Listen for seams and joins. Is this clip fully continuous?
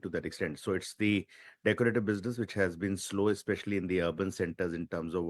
no; 1 cut; at 4.2 s

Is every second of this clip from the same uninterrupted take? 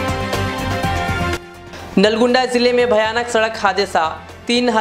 no; 1 cut; at 1.5 s

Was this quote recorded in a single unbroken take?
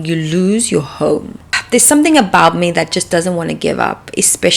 no; 1 cut; at 1.4 s

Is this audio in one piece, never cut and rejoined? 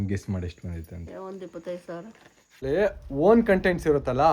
no; 1 cut; at 2.6 s

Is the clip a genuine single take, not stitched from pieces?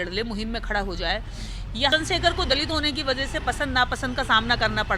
no; 1 cut; at 1.9 s

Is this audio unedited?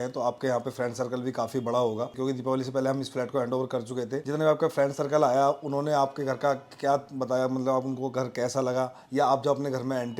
no; 1 cut; at 2.1 s

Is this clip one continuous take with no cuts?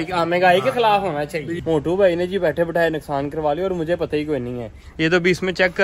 no; 1 cut; at 1.4 s

